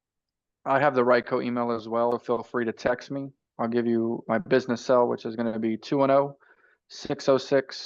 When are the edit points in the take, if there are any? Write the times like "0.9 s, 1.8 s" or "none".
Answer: 2.1 s